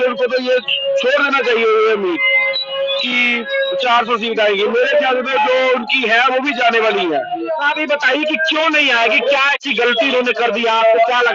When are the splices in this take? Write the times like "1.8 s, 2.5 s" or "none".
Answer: none

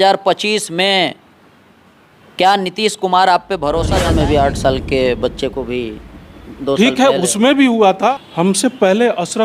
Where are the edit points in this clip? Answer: 4.0 s, 8.1 s

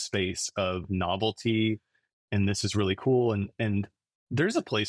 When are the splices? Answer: none

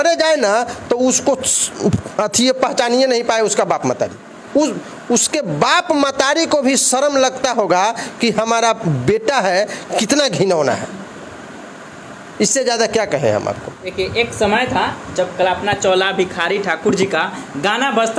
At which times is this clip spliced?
none

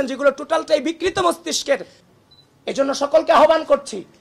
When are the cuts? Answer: 1.9 s

